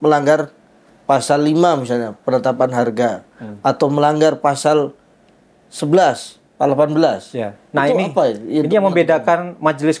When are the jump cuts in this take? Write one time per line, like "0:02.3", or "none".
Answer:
none